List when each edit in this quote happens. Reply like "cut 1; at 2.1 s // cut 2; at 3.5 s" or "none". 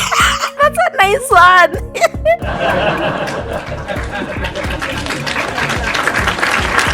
none